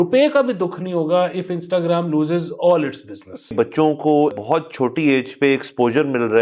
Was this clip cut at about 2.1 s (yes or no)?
no